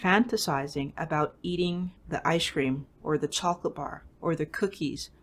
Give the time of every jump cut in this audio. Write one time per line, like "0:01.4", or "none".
0:02.0